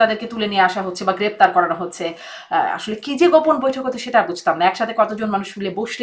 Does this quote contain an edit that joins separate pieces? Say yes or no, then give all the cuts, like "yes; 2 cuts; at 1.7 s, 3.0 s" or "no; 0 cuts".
no; 0 cuts